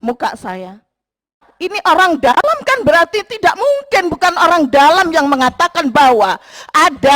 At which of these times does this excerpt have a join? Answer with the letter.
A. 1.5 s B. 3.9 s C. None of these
A